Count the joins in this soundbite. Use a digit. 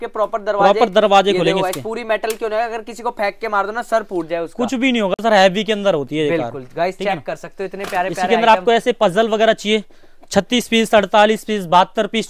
0